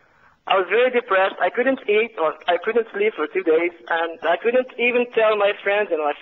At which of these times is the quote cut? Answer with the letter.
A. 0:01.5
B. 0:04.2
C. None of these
B